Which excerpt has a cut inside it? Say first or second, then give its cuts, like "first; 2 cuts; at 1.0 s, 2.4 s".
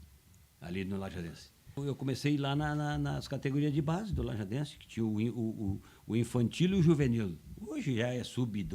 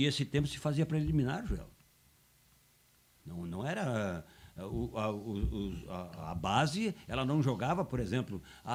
first; 1 cut; at 1.8 s